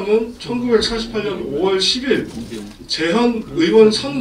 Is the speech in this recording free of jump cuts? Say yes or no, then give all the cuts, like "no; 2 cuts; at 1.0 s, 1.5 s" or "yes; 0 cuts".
yes; 0 cuts